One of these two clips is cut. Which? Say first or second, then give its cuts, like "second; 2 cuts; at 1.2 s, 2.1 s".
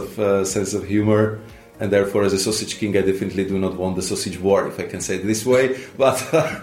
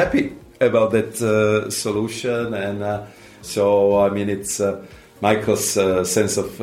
first; 1 cut; at 1.7 s